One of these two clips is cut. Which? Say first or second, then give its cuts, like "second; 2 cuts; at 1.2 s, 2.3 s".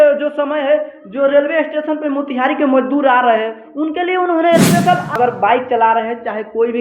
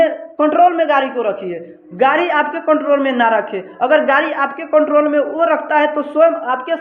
first; 1 cut; at 5.2 s